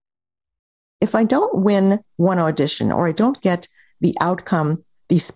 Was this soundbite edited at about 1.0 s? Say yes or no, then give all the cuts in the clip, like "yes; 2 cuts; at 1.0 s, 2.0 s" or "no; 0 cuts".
yes; 1 cut; at 1.0 s